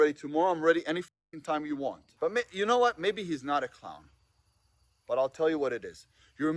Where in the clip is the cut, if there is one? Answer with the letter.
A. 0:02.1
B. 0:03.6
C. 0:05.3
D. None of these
A